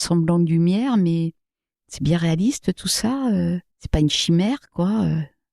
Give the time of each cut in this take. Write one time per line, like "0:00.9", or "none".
0:03.7